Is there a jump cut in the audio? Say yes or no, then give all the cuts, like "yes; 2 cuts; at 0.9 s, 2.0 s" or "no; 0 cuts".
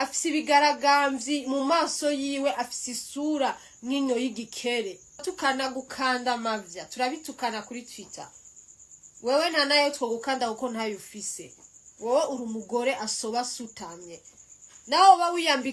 yes; 1 cut; at 5.3 s